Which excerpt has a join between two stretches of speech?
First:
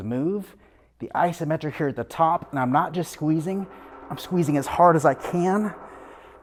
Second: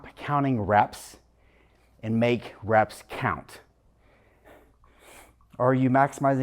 second; 1 cut; at 4.5 s

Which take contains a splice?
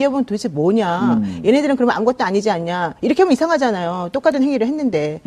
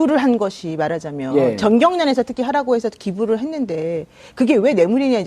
second; 1 cut; at 1.3 s

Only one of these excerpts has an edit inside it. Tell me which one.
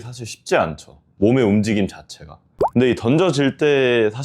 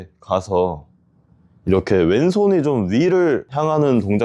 first; 1 cut; at 2.7 s

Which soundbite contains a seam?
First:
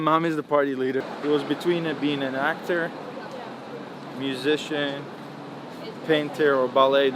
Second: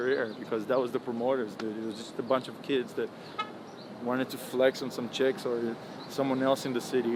first; 1 cut; at 1.1 s

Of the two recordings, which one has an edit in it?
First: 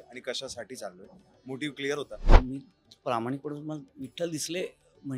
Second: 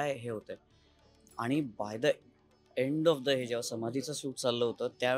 first; 1 cut; at 2.3 s

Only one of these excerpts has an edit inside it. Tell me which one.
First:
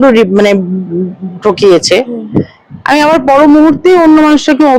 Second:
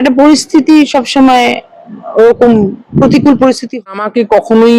second; 1 cut; at 3.8 s

